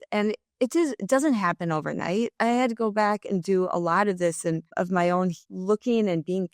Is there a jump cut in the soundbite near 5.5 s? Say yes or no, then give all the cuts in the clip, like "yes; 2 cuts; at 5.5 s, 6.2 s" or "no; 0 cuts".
yes; 2 cuts; at 4.7 s, 5.5 s